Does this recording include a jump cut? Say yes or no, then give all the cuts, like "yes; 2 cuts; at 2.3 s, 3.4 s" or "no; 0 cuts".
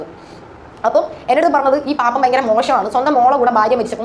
no; 0 cuts